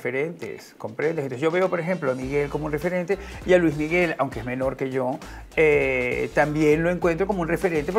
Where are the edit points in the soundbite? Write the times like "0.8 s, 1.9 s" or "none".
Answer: none